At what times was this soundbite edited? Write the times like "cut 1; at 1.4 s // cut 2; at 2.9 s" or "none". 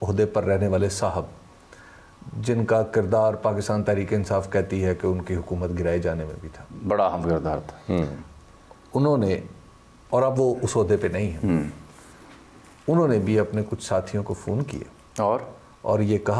none